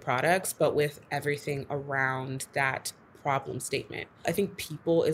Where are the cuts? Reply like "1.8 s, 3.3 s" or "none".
4.2 s